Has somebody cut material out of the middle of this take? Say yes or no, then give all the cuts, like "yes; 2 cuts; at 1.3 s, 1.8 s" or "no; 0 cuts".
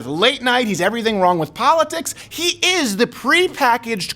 yes; 1 cut; at 2.2 s